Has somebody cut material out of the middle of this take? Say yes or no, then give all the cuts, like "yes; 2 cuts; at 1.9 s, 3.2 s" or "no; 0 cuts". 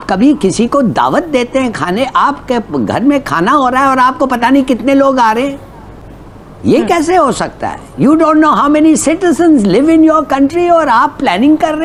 no; 0 cuts